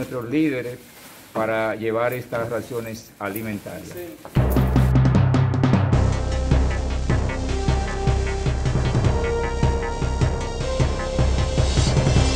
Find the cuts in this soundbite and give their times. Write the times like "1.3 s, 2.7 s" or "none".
4.2 s